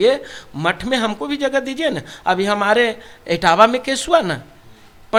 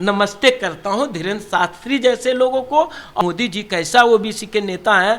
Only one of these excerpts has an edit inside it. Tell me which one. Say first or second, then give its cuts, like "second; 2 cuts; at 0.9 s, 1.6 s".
second; 1 cut; at 3.2 s